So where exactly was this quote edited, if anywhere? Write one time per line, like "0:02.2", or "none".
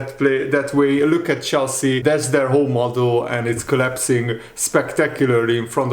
0:02.0